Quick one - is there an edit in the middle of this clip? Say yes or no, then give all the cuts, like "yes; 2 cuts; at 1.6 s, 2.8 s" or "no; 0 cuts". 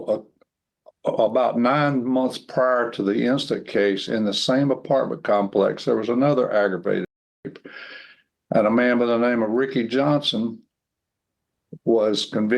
no; 0 cuts